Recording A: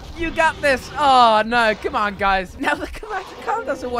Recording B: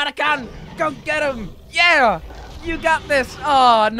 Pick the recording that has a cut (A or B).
A